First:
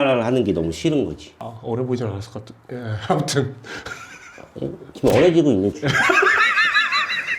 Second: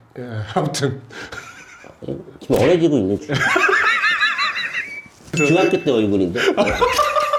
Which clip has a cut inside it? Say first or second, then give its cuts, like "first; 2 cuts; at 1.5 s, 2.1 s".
first; 1 cut; at 1.3 s